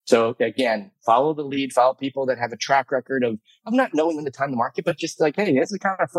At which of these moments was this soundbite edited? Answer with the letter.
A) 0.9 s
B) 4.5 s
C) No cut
A